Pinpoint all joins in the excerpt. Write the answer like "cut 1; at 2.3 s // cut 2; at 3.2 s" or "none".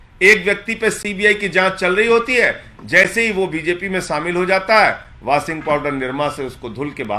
none

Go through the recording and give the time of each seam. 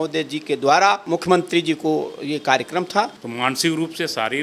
cut 1; at 1.0 s // cut 2; at 3.2 s

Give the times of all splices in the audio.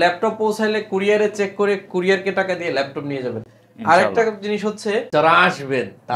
none

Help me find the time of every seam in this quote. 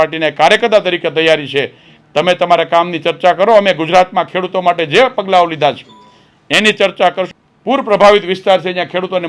cut 1; at 7.3 s

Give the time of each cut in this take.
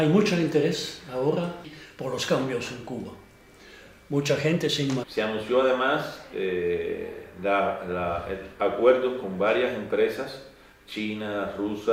none

